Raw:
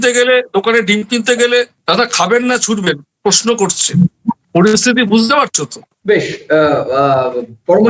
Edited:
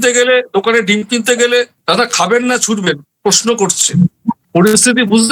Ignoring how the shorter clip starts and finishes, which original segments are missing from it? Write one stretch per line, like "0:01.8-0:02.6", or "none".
none